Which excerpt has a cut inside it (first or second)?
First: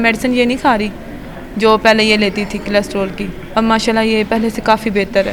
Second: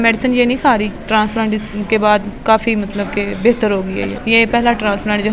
second